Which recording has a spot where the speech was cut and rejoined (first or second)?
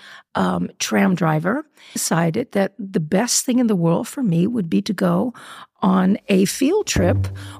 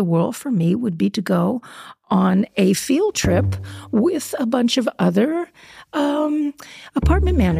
first